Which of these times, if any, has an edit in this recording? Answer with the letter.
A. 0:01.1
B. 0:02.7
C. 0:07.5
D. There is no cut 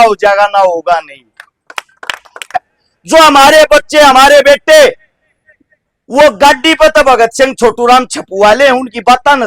B